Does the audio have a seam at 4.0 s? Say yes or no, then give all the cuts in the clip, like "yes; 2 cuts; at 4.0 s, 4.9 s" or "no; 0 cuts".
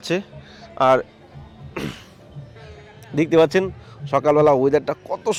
no; 0 cuts